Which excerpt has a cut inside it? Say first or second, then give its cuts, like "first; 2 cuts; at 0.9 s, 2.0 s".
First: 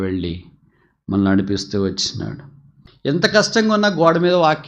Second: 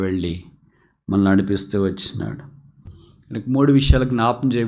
first; 1 cut; at 2.9 s